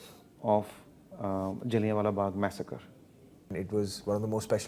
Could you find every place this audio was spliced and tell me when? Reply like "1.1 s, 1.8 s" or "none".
3.5 s